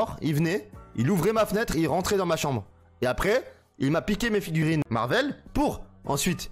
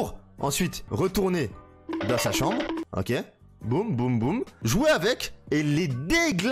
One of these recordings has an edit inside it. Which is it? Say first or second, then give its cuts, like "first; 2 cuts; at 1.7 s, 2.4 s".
first; 1 cut; at 4.6 s